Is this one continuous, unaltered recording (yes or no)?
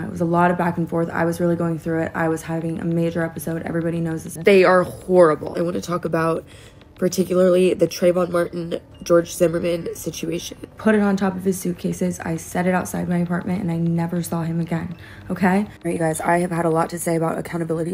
no